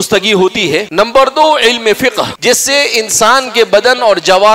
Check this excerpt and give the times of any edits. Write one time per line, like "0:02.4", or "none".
0:00.9
0:02.3